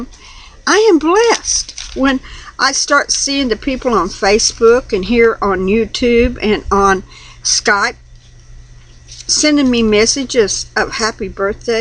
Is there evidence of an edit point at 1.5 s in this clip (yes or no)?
no